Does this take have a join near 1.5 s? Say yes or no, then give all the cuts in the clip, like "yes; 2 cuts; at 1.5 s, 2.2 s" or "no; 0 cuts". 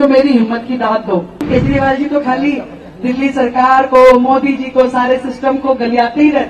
yes; 1 cut; at 1.5 s